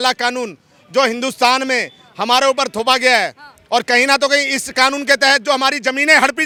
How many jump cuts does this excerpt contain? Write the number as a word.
zero